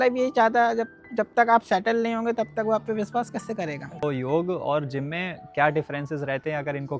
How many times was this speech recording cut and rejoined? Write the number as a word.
one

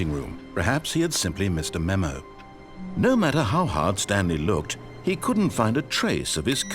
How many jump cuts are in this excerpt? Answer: one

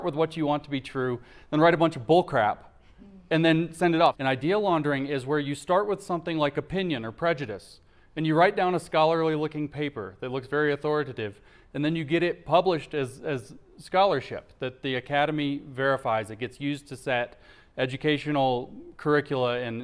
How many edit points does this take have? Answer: one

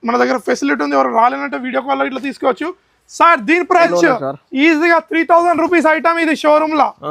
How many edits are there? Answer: one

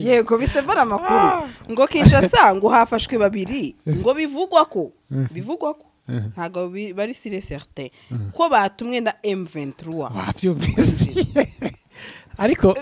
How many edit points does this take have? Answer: zero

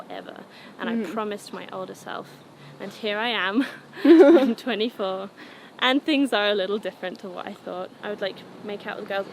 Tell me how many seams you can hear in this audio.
one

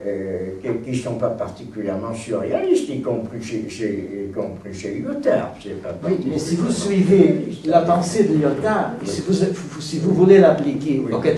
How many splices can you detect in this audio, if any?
one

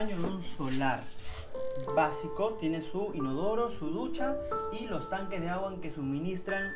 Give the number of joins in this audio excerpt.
zero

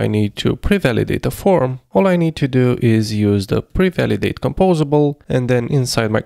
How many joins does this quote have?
two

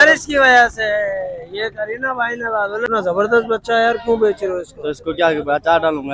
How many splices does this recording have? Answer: one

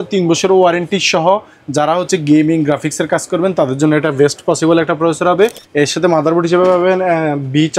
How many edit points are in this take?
one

